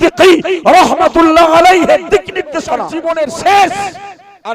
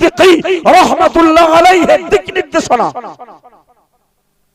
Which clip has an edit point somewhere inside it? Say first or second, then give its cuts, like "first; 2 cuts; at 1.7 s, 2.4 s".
first; 1 cut; at 2.9 s